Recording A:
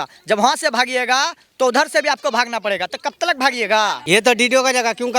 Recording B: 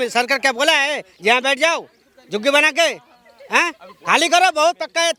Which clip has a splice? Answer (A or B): A